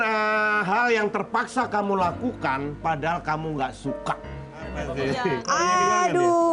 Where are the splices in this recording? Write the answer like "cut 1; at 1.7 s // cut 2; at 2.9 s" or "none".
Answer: cut 1; at 4.8 s